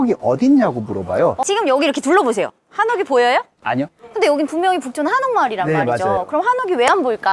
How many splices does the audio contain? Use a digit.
2